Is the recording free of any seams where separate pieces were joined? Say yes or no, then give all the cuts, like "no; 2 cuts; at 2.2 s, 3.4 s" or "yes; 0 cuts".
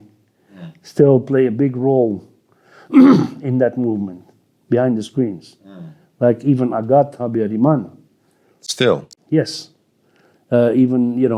yes; 0 cuts